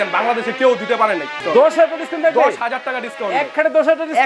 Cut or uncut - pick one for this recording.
cut